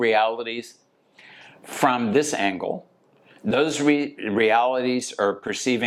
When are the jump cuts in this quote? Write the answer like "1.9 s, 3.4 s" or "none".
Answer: none